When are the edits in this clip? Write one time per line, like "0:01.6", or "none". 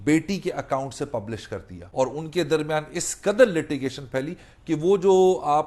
0:01.8